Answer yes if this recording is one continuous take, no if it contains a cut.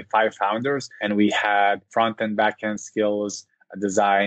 no